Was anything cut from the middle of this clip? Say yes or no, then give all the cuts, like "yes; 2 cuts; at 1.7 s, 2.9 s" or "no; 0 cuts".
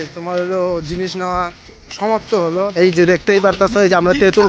yes; 1 cut; at 2.7 s